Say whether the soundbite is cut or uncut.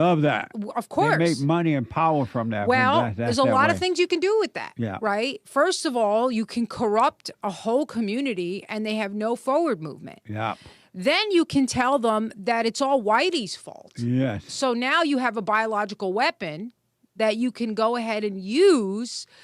uncut